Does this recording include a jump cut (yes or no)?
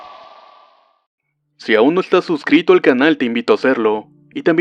no